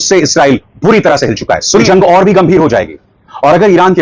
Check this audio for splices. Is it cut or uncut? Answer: cut